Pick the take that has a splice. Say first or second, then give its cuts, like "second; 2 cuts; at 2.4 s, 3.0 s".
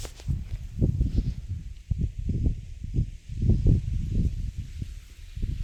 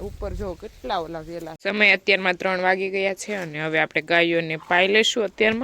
second; 1 cut; at 1.5 s